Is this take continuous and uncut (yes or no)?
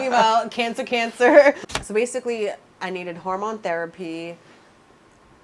no